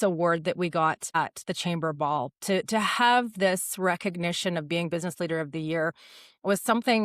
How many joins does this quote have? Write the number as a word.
one